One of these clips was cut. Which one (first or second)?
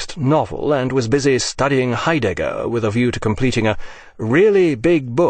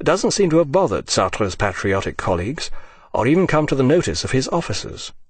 second